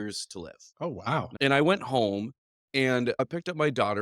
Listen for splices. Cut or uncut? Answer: cut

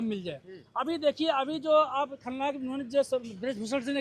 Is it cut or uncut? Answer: uncut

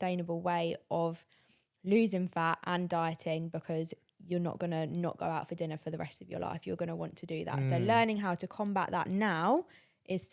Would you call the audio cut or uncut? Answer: uncut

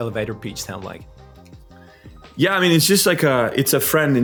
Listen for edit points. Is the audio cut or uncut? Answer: uncut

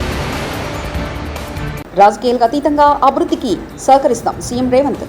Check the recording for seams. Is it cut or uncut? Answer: cut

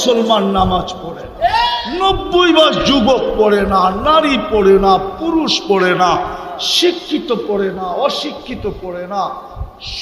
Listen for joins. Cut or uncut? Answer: cut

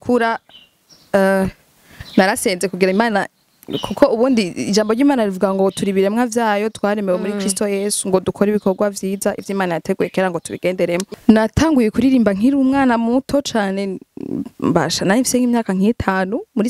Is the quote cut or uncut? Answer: cut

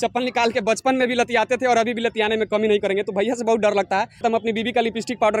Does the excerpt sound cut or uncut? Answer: cut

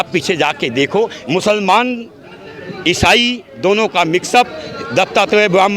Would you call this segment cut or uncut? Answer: cut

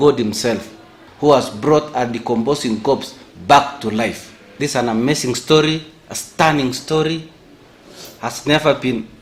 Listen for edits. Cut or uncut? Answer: uncut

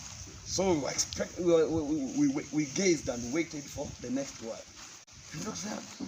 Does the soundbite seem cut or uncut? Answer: uncut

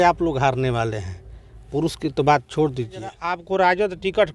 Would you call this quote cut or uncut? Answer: cut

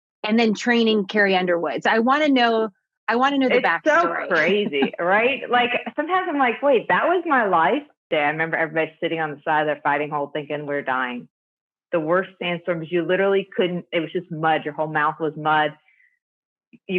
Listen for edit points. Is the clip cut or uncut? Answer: cut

